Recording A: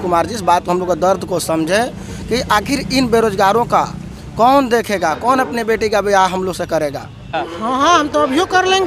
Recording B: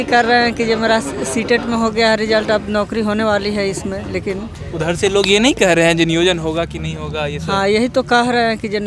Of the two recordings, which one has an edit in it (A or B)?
A